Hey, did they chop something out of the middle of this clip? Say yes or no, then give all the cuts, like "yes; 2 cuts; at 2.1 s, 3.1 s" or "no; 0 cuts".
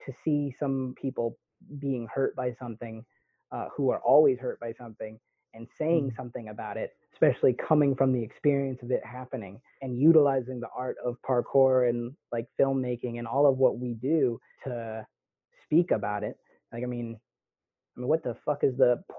yes; 3 cuts; at 0.9 s, 9.8 s, 14.5 s